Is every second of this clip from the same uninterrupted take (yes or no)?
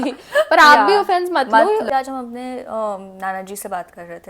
no